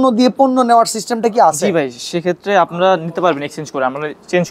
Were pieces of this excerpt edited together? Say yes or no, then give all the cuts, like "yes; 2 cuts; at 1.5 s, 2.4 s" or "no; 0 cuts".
no; 0 cuts